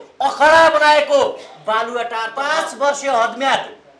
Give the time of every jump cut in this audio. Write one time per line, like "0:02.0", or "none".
0:02.3